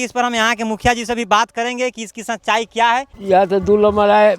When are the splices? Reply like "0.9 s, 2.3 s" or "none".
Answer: 3.1 s

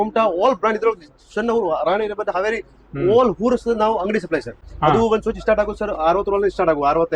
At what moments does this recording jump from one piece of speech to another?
4.6 s

